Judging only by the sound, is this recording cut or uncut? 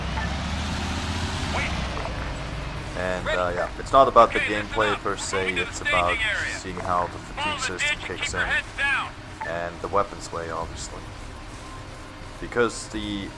cut